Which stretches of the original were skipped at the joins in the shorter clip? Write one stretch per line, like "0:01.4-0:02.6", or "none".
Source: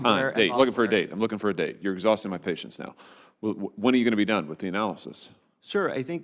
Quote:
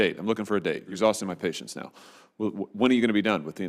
0:01.9-0:02.0